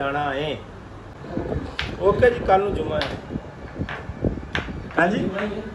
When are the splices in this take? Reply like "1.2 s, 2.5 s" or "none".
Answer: 1.0 s